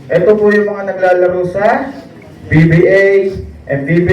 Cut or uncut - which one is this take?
uncut